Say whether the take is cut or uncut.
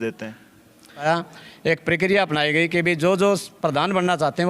cut